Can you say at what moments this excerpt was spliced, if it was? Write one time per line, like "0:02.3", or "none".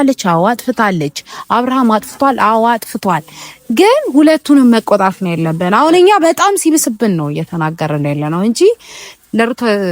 none